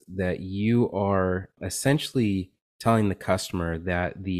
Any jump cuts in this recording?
yes; 1 cut; at 1.6 s

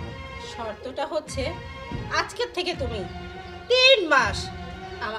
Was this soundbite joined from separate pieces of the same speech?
no; 0 cuts

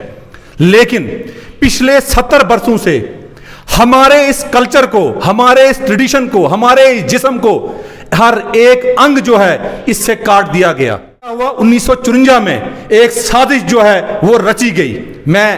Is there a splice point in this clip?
yes; 1 cut; at 11.5 s

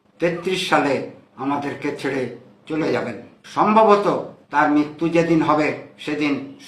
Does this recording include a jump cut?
yes; 1 cut; at 3.4 s

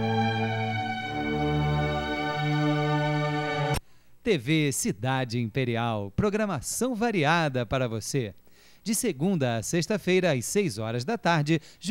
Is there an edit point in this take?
yes; 1 cut; at 3.8 s

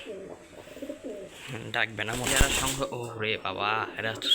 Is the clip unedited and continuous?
no; 1 cut; at 2.3 s

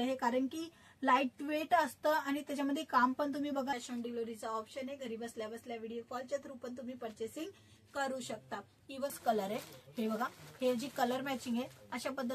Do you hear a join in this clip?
yes; 2 cuts; at 3.7 s, 9.2 s

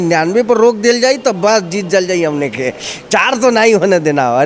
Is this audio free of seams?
yes; 0 cuts

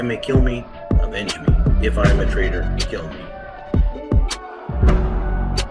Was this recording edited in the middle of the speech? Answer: yes; 1 cut; at 3.4 s

